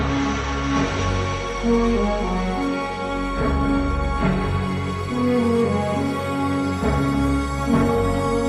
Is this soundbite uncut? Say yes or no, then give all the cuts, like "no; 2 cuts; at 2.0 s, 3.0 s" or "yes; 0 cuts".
no; 1 cut; at 4.9 s